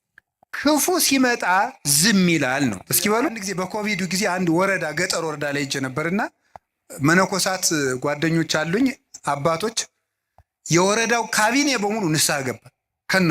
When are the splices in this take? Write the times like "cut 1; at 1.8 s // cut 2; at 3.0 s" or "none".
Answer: cut 1; at 3.5 s